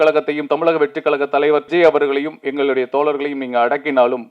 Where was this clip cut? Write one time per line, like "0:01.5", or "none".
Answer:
0:01.7